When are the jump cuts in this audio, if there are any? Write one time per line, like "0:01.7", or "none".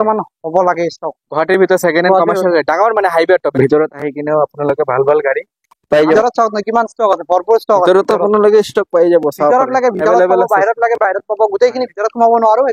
0:03.5
0:06.1